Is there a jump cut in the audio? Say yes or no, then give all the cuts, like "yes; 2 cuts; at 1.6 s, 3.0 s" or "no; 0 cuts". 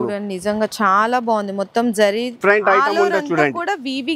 yes; 1 cut; at 2.4 s